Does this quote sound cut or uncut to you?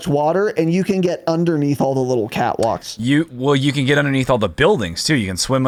uncut